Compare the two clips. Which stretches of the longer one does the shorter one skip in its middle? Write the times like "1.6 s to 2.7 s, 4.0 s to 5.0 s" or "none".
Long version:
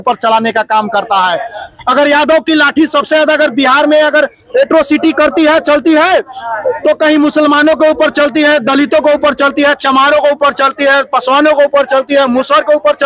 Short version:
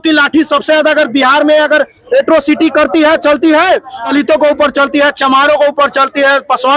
6.5 s to 8.7 s